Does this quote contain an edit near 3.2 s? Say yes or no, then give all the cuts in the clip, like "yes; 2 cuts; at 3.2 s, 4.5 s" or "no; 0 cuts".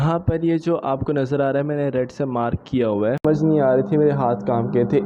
yes; 1 cut; at 3.2 s